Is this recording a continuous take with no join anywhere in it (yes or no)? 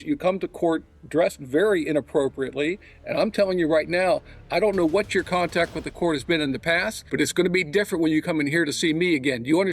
no